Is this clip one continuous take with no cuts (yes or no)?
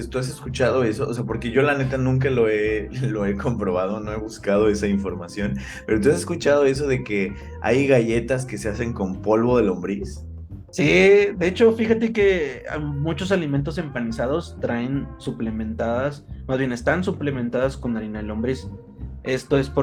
yes